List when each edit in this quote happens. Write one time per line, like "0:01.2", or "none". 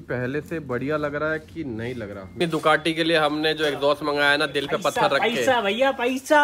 0:02.4